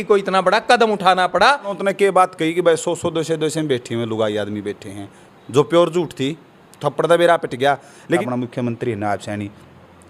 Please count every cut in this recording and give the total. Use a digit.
2